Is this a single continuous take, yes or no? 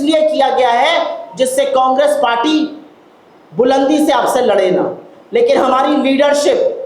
yes